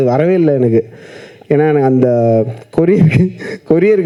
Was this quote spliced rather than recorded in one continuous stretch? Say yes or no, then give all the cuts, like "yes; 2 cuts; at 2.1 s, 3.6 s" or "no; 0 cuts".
no; 0 cuts